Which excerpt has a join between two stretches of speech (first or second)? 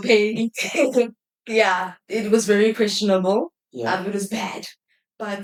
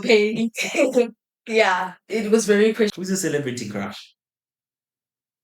second